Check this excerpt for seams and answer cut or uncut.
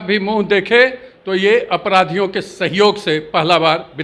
uncut